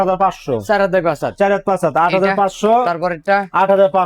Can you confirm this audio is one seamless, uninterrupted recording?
yes; 0 cuts

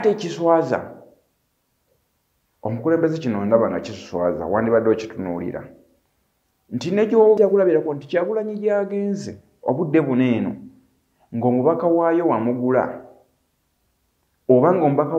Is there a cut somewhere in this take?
yes; 1 cut; at 7.4 s

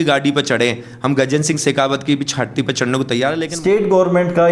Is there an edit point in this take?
yes; 1 cut; at 3.5 s

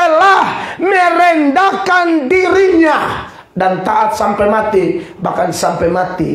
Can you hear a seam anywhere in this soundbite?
no; 0 cuts

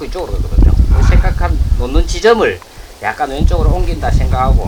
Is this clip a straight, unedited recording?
yes; 0 cuts

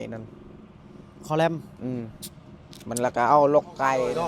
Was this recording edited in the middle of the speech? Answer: no; 0 cuts

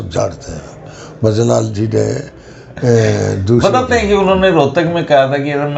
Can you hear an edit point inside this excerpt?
no; 0 cuts

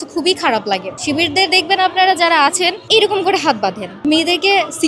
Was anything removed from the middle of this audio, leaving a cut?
yes; 3 cuts; at 0.9 s, 2.8 s, 4.0 s

